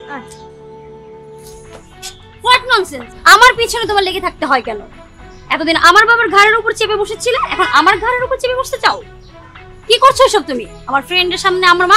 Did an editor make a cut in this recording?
no; 0 cuts

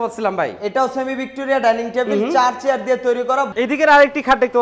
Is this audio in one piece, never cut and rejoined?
no; 1 cut; at 3.5 s

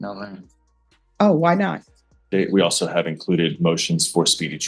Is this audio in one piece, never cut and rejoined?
no; 1 cut; at 2.3 s

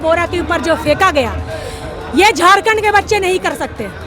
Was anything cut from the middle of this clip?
no; 0 cuts

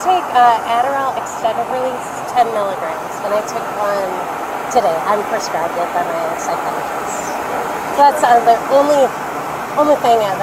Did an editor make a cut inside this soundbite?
no; 0 cuts

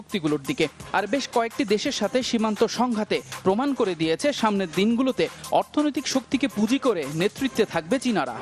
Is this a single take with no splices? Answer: no; 1 cut; at 2.4 s

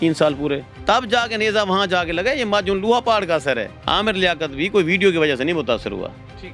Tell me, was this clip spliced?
yes; 1 cut; at 3.7 s

